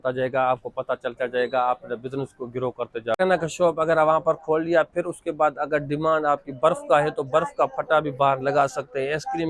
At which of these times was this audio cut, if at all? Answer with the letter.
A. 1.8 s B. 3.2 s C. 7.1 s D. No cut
B